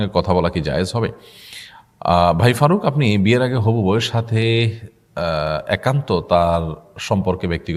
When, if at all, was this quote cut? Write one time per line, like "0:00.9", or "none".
none